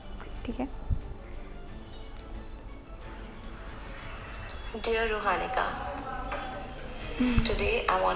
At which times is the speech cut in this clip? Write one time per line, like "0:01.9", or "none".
none